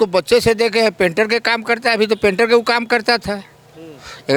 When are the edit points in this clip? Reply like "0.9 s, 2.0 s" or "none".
none